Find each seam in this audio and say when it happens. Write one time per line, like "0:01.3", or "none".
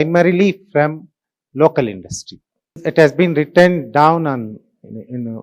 0:02.8

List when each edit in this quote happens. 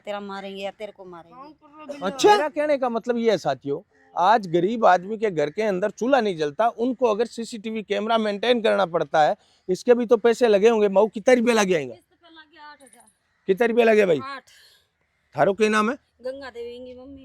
0:02.6

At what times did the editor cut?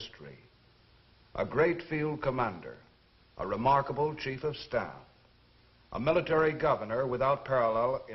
0:04.9

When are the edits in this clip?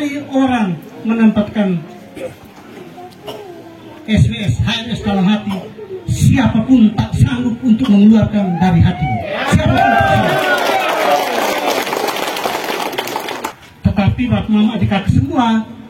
0:13.5

